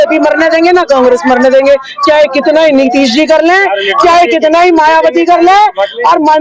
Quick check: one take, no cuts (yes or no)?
yes